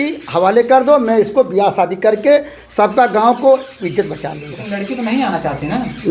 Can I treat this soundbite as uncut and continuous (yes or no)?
yes